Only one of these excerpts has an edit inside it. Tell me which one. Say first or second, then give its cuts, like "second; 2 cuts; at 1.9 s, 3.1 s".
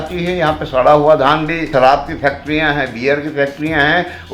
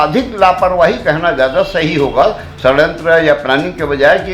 first; 1 cut; at 1.7 s